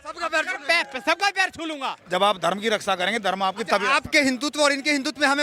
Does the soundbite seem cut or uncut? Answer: cut